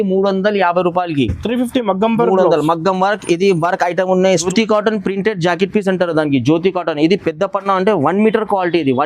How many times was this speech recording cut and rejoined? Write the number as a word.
one